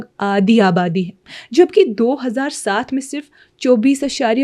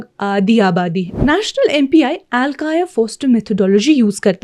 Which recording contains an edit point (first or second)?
second